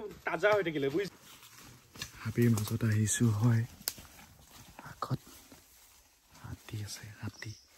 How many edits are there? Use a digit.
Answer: 1